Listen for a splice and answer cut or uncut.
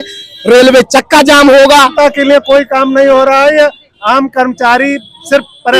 cut